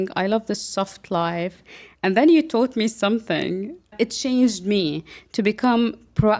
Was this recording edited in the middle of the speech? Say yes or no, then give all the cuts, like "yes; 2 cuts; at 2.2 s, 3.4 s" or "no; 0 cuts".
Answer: yes; 1 cut; at 3.9 s